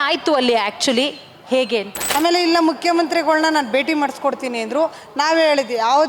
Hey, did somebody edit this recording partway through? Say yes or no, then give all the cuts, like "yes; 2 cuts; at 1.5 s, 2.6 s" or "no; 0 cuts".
yes; 1 cut; at 2.0 s